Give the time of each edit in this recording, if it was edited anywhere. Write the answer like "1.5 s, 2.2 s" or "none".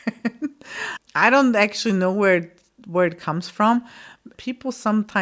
4.3 s